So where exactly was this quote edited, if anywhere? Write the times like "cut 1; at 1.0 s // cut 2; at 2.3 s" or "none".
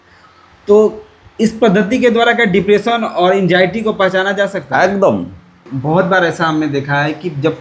cut 1; at 5.7 s

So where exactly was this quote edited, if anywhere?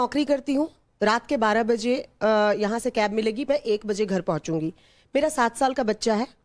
none

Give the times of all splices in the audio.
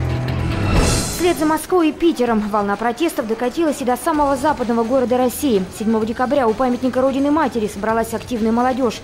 cut 1; at 1.0 s

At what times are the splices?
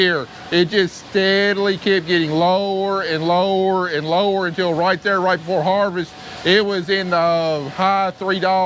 none

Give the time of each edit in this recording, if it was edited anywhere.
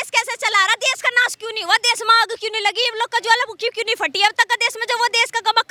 none

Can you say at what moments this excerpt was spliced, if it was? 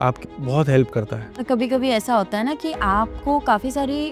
cut 1; at 1.4 s

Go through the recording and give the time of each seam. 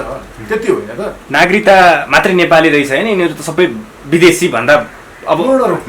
cut 1; at 1.2 s // cut 2; at 3.9 s

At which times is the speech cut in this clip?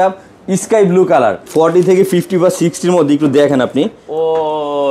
cut 1; at 1.4 s

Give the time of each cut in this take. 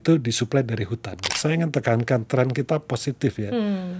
cut 1; at 1.3 s

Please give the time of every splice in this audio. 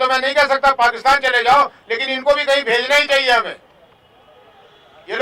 none

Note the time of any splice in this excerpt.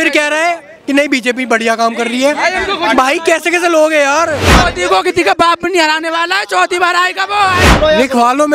cut 1; at 4.5 s // cut 2; at 7.7 s

